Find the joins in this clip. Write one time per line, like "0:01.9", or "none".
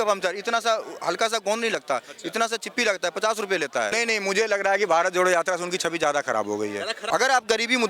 0:03.9
0:06.9